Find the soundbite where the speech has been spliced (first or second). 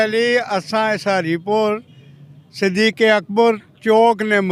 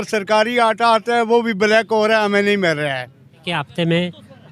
second